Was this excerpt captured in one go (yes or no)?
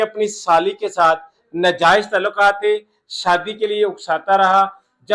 yes